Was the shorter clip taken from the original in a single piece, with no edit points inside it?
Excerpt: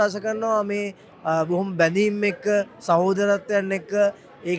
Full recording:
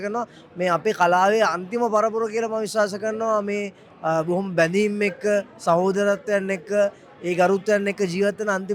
yes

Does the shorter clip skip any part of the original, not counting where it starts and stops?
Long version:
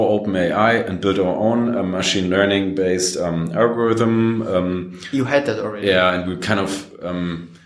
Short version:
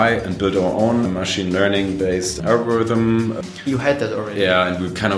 yes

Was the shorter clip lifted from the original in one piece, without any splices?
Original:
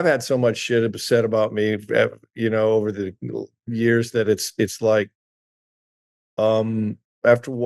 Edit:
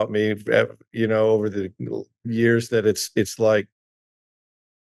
yes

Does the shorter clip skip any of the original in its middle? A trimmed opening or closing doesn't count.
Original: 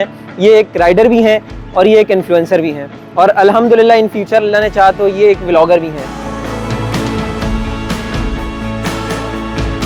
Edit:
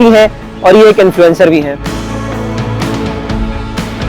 yes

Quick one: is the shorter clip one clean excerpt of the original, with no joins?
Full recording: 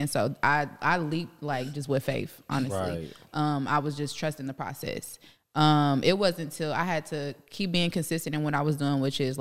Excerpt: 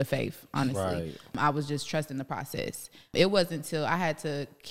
no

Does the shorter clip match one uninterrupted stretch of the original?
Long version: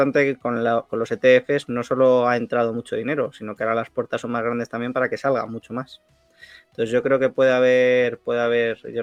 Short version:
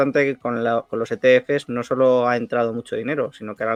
yes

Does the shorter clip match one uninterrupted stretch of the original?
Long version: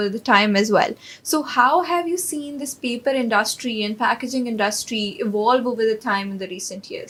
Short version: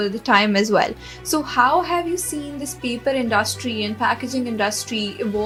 yes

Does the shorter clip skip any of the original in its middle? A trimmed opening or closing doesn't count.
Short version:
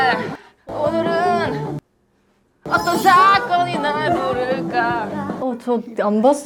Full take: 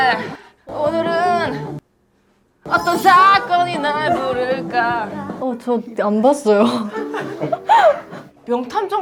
no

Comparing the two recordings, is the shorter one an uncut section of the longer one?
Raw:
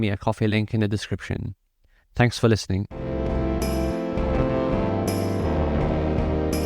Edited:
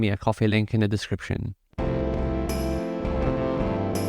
no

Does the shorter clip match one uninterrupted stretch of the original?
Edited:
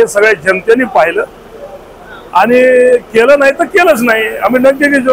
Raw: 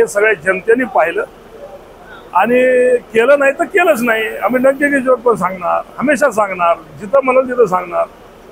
yes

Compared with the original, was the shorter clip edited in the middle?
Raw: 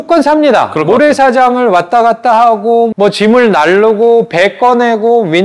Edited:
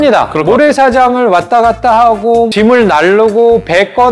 yes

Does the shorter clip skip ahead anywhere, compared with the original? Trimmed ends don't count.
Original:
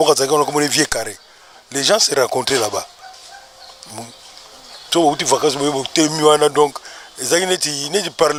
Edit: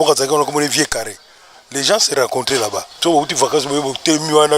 yes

